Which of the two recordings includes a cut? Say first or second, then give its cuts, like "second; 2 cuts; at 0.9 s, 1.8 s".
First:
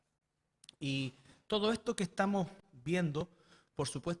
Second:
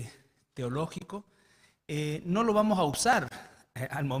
first; 1 cut; at 2.0 s